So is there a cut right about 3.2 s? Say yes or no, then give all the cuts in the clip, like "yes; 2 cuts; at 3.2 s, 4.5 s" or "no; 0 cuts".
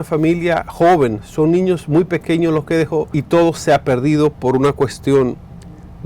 yes; 1 cut; at 3.2 s